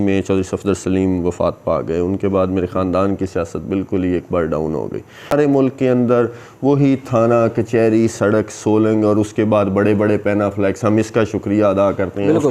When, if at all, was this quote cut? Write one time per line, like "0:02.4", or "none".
0:05.3

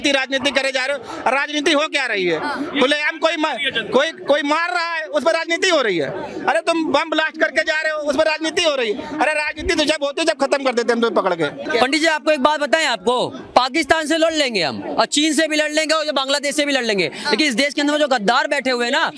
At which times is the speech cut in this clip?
0:11.6

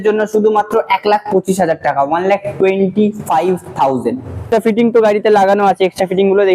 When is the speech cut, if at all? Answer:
0:04.4

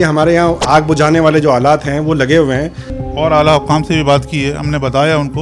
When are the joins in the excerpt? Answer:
0:02.9

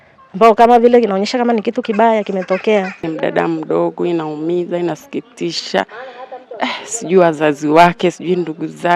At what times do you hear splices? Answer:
0:03.1

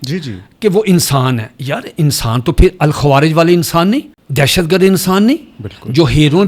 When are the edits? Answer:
0:04.2

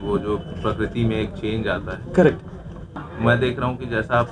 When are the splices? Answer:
0:02.9

